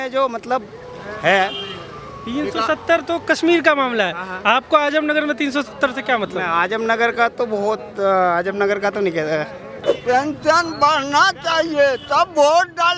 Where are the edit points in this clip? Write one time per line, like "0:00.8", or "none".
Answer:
0:09.9